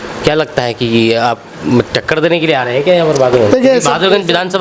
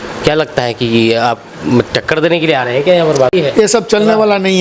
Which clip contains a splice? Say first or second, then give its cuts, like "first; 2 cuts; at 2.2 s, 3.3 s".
second; 1 cut; at 3.3 s